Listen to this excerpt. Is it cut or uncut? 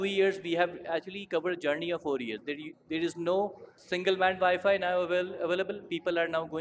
cut